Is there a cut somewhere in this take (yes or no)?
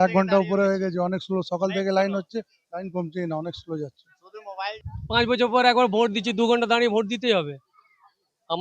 yes